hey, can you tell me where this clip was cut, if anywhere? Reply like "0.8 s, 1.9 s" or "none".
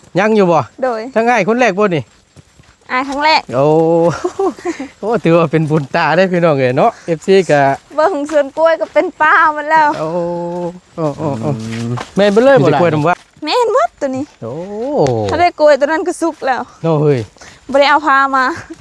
11.6 s